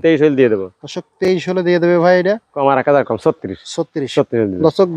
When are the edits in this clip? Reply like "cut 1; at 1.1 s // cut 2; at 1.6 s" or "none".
cut 1; at 2.5 s